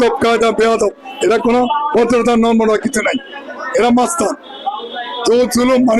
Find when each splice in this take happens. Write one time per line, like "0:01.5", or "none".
none